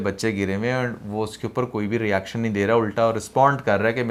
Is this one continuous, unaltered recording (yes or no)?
yes